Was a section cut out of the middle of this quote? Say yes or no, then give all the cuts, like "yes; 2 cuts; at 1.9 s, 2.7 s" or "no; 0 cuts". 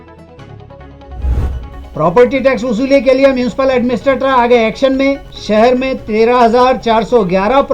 yes; 1 cut; at 1.5 s